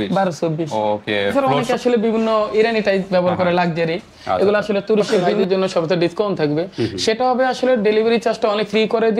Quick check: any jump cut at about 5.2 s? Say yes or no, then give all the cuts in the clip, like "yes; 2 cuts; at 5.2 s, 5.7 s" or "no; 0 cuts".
yes; 2 cuts; at 1.3 s, 5.2 s